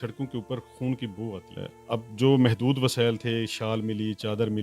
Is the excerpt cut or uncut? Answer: cut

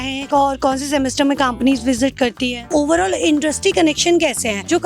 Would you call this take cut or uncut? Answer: cut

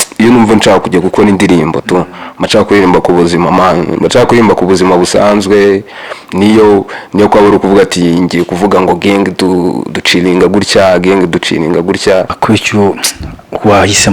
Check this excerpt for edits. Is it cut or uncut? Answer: cut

